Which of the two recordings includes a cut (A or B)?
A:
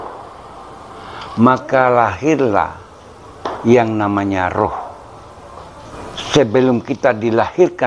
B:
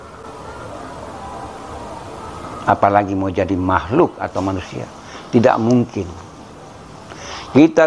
A